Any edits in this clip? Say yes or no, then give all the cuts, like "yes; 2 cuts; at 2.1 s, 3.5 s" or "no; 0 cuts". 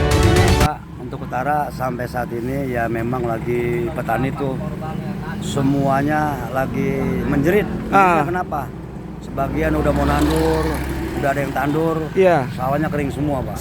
no; 0 cuts